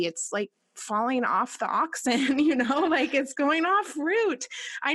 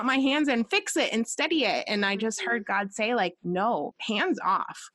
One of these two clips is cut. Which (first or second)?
second